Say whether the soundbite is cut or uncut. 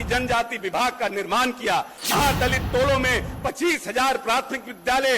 cut